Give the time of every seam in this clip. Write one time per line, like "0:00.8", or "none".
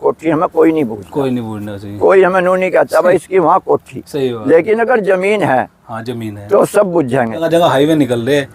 0:07.4